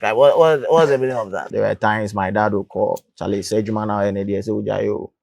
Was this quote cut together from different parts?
yes; 1 cut; at 1.3 s

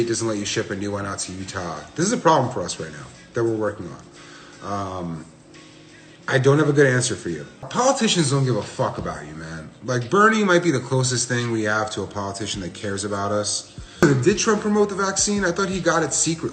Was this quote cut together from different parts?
yes; 2 cuts; at 7.6 s, 14.0 s

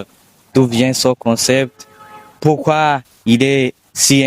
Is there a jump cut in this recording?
yes; 1 cut; at 3.1 s

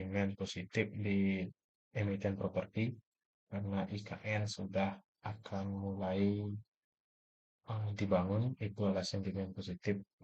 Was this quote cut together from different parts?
no; 0 cuts

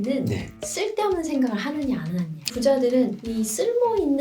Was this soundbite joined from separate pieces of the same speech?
yes; 1 cut; at 2.4 s

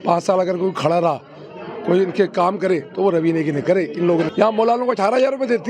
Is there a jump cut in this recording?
yes; 1 cut; at 4.3 s

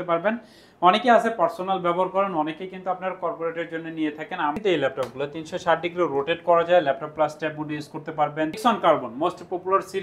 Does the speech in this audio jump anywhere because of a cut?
yes; 2 cuts; at 4.6 s, 8.6 s

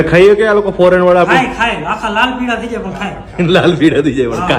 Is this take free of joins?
yes; 0 cuts

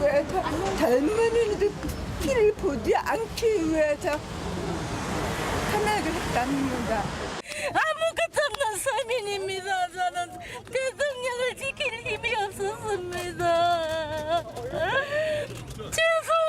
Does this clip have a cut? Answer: yes; 1 cut; at 5.0 s

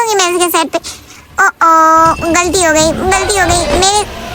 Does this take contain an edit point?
no; 0 cuts

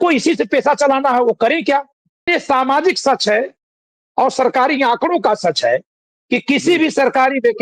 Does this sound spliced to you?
yes; 1 cut; at 2.3 s

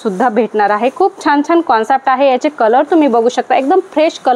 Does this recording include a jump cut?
no; 0 cuts

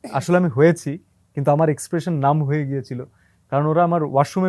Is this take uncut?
yes; 0 cuts

